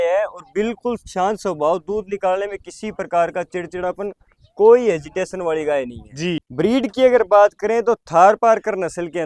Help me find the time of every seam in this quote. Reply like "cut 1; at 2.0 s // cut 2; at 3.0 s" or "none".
cut 1; at 6.3 s